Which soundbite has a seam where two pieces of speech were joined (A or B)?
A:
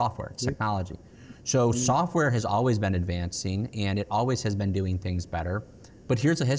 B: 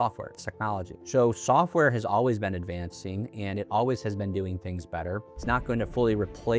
B